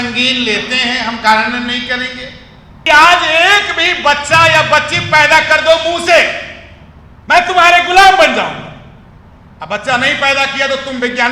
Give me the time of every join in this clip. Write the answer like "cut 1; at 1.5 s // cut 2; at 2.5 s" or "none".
cut 1; at 2.7 s